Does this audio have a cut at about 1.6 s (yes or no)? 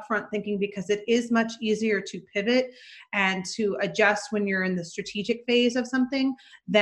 no